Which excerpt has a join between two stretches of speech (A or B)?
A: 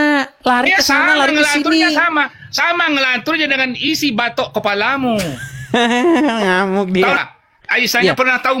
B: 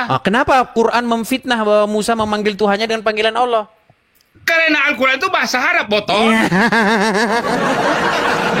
A